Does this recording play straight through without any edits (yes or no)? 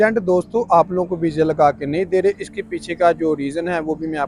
yes